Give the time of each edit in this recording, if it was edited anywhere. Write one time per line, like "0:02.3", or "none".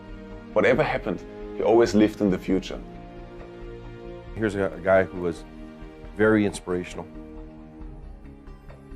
0:01.2